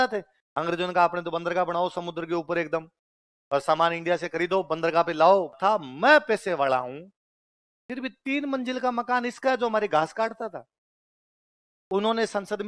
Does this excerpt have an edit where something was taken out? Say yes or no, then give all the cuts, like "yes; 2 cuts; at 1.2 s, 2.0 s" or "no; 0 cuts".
yes; 1 cut; at 5.6 s